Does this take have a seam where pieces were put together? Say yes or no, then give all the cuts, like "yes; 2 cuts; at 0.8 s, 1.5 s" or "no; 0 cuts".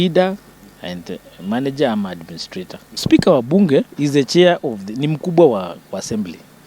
yes; 1 cut; at 3.0 s